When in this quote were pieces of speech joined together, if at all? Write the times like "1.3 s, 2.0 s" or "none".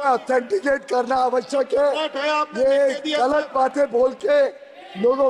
none